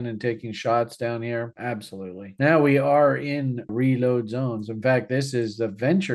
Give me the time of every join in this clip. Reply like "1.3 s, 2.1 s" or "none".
2.3 s, 3.7 s